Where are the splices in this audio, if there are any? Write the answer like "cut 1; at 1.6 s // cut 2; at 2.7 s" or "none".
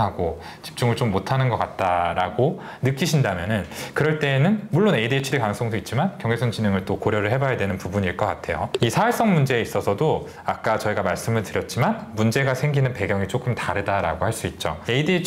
none